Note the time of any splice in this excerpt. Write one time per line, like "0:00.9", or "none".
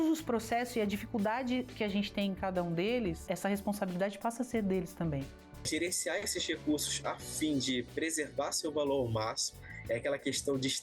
0:05.7